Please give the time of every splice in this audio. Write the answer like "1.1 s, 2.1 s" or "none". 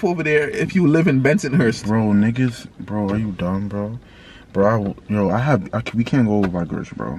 none